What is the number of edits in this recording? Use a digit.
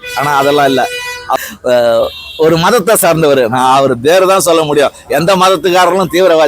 1